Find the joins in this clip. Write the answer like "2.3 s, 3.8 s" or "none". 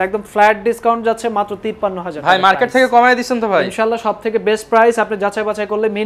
none